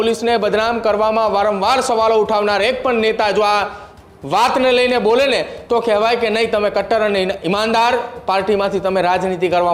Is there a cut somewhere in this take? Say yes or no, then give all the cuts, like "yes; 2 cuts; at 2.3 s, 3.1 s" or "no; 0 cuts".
no; 0 cuts